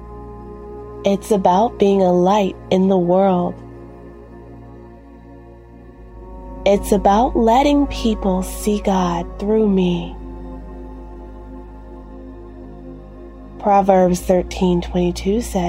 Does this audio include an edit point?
no; 0 cuts

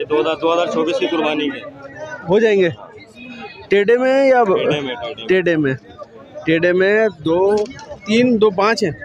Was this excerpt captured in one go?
yes; 0 cuts

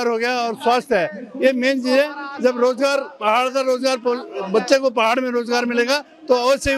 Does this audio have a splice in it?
no; 0 cuts

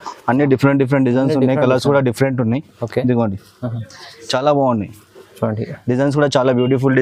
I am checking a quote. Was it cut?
no; 0 cuts

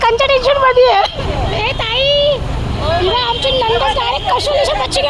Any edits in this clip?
yes; 1 cut; at 1.2 s

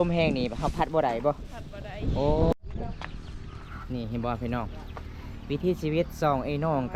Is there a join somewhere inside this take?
yes; 1 cut; at 2.5 s

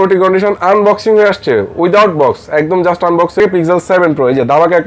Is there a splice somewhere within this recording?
yes; 1 cut; at 3.4 s

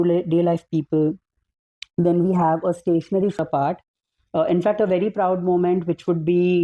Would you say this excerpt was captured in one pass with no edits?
no; 1 cut; at 3.4 s

